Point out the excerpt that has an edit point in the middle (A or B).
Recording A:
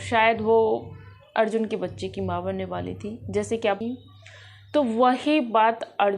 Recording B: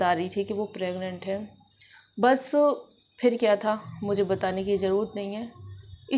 A